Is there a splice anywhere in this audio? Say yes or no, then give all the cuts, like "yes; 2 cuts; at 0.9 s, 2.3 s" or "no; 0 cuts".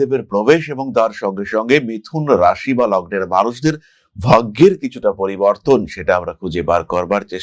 no; 0 cuts